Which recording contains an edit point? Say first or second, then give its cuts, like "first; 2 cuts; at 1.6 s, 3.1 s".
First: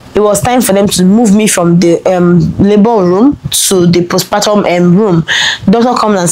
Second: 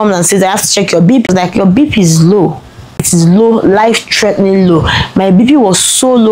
second; 2 cuts; at 1.2 s, 3.1 s